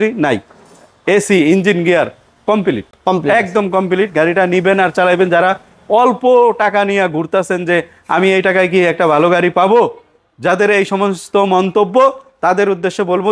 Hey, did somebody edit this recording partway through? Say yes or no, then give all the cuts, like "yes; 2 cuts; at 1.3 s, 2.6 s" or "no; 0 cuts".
no; 0 cuts